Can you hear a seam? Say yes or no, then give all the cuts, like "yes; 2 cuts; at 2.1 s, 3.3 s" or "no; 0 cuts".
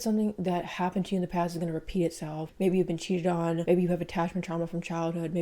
yes; 1 cut; at 2.4 s